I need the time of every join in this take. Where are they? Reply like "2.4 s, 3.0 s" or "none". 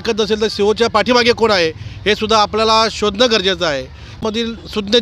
4.1 s